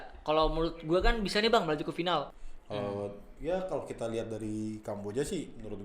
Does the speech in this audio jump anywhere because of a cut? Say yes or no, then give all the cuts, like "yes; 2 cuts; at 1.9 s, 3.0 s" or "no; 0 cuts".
yes; 1 cut; at 2.3 s